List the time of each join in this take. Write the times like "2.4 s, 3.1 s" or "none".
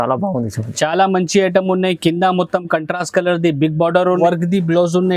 4.2 s